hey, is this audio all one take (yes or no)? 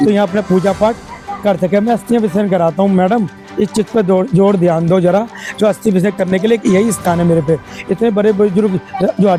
yes